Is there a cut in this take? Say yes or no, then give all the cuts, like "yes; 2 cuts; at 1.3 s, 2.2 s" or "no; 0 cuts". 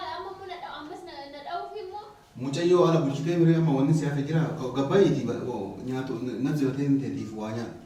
no; 0 cuts